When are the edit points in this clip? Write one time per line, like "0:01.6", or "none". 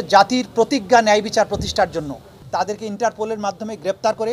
0:02.3

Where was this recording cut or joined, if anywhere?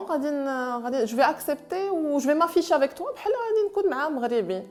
none

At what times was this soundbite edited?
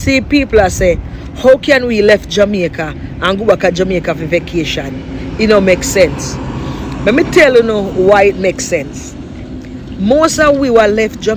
none

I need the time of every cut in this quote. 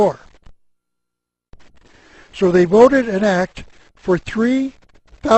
0:01.3

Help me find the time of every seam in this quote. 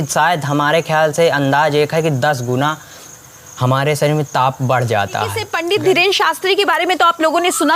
0:05.5

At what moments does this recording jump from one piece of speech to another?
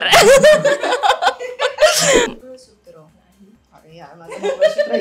0:02.3

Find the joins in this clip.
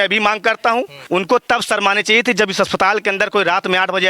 0:01.0

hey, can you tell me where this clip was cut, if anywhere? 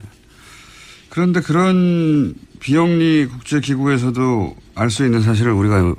0:01.7

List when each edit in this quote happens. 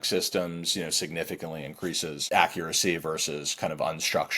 0:02.2

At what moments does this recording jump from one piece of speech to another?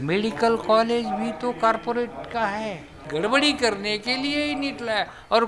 0:03.0

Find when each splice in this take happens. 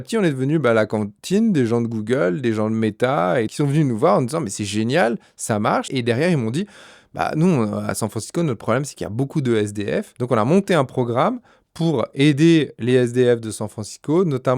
0:03.5
0:05.9
0:10.1

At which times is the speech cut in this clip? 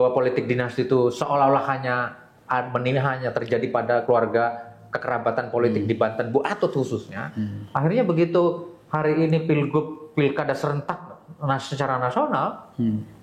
none

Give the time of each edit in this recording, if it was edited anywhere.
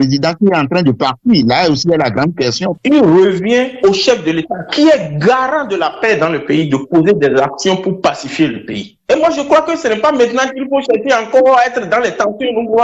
0:02.7

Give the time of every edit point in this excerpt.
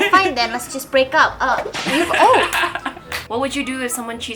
0:03.0

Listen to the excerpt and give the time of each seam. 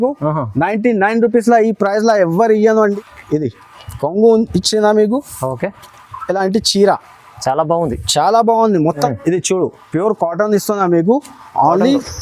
0:02.9
0:09.1

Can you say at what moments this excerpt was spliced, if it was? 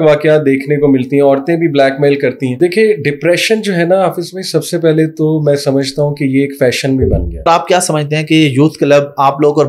0:02.6
0:07.5

